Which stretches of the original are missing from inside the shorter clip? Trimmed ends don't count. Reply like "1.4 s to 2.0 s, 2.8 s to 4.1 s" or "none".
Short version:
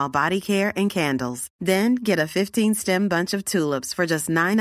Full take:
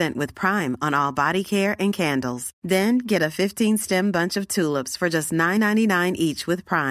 none